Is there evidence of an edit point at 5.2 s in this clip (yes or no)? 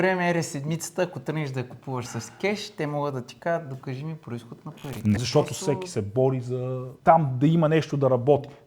yes